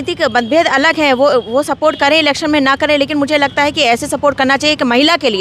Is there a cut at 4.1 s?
no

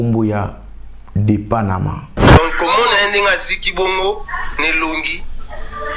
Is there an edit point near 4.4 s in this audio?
no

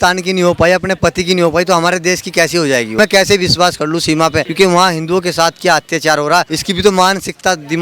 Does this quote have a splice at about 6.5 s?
yes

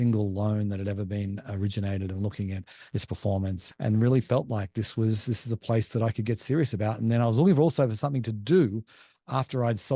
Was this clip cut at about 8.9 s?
no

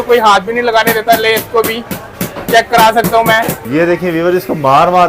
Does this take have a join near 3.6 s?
yes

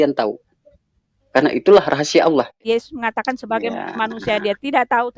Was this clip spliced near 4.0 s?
no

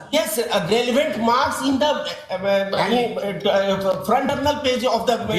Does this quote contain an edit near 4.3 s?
yes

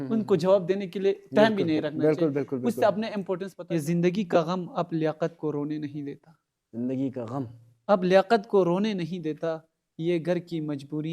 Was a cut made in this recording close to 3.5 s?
yes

